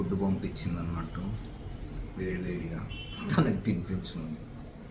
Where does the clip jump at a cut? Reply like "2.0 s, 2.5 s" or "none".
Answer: none